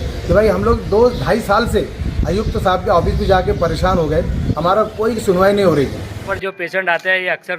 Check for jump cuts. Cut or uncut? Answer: cut